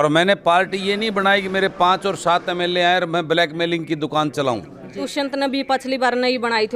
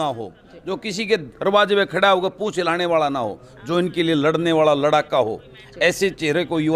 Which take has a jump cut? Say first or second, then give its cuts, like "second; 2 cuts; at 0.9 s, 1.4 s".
first; 1 cut; at 5.0 s